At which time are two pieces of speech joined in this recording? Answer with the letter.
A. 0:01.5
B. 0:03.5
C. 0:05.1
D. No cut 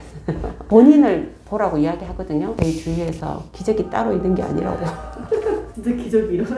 D